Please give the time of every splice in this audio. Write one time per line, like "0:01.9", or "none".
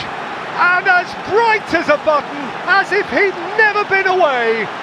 none